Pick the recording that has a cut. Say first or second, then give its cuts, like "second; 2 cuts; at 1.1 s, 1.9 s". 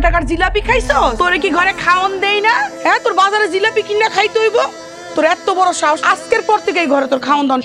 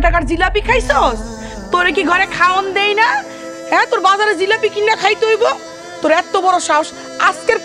first; 3 cuts; at 1.1 s, 2.7 s, 6.0 s